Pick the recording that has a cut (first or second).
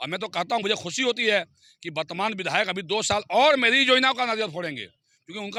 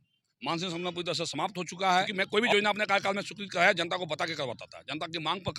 second